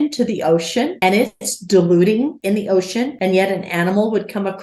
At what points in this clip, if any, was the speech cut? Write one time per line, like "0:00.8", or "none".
0:00.9
0:02.6